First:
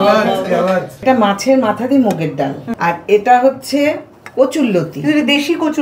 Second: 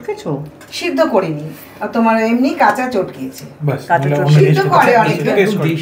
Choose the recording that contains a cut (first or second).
first